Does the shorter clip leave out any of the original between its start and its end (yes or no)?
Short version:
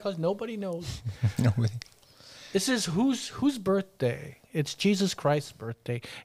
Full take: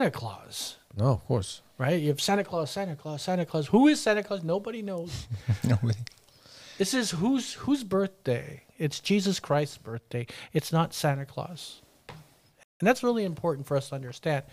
no